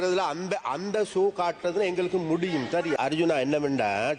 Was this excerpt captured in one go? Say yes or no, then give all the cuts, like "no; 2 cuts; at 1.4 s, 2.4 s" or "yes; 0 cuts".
no; 1 cut; at 2.9 s